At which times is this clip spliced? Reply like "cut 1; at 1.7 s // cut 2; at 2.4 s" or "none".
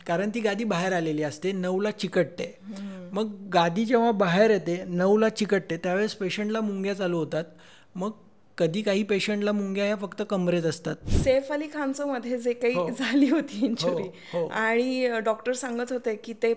cut 1; at 11.1 s